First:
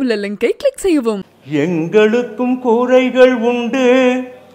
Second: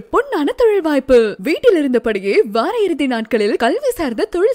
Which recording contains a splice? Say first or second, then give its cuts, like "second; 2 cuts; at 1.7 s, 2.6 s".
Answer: first; 1 cut; at 1.3 s